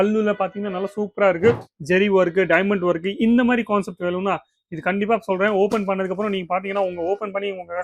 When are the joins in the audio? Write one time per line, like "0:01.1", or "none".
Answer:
0:01.7